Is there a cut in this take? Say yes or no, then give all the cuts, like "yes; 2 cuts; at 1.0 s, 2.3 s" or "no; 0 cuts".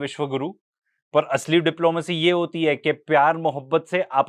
no; 0 cuts